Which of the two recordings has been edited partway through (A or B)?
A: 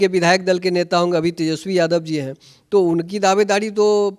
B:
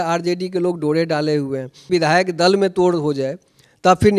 B